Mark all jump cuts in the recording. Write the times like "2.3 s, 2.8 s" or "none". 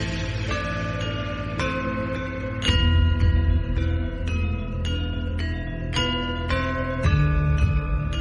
none